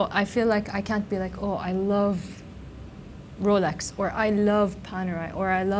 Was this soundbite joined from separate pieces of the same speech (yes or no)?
no